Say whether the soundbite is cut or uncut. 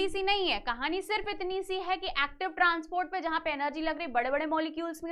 uncut